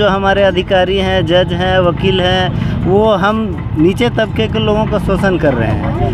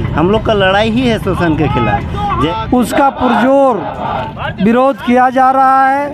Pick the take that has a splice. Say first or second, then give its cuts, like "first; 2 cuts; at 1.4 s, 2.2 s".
second; 1 cut; at 2.3 s